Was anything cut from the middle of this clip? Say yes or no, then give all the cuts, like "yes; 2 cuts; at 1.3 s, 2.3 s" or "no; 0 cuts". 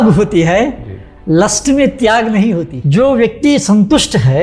yes; 1 cut; at 2.7 s